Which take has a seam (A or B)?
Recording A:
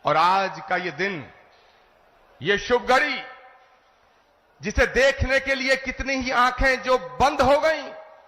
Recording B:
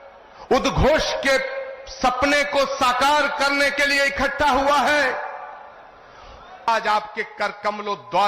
B